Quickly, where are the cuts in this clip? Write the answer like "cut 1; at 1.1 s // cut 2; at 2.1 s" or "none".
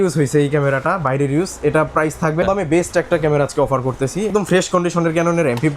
cut 1; at 2.4 s // cut 2; at 4.3 s